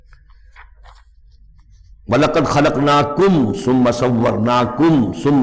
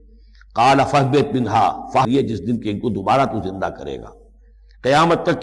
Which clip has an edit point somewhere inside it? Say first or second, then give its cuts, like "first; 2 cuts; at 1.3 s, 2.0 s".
second; 1 cut; at 2.0 s